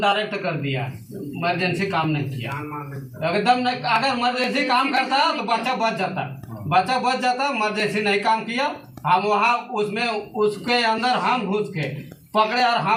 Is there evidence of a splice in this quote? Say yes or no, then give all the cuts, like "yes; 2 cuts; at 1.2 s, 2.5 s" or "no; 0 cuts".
no; 0 cuts